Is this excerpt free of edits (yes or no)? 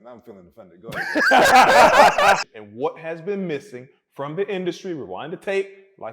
no